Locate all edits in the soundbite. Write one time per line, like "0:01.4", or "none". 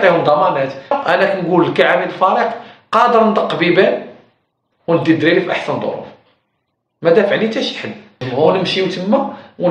0:00.9
0:08.2